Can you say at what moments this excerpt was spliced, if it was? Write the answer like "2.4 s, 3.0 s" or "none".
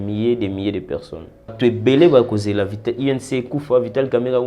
1.5 s